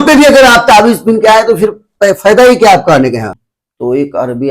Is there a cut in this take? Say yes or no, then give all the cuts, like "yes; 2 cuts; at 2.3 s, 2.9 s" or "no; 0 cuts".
yes; 1 cut; at 3.4 s